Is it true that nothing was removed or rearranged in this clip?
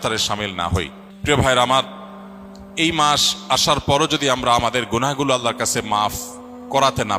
no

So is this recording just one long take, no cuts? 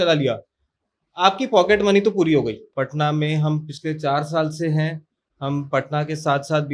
no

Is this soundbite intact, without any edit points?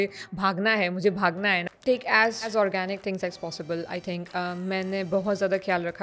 no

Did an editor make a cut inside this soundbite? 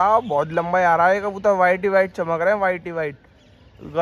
no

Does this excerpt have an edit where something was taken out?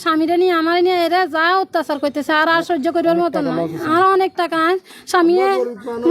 no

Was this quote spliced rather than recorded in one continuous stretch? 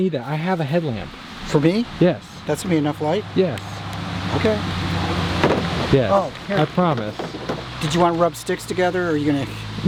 no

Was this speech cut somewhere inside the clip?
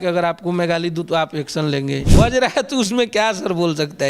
yes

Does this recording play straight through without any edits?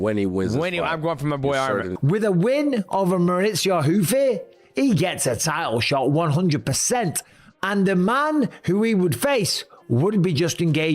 no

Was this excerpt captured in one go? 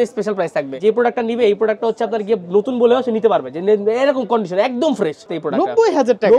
no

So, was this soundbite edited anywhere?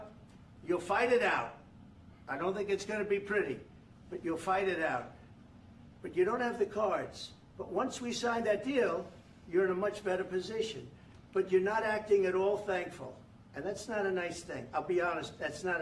no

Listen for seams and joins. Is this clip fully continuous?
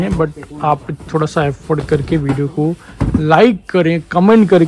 yes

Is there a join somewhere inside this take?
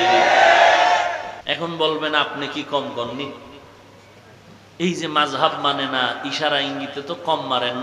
yes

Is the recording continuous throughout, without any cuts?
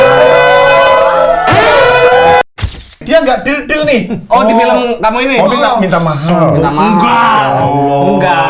no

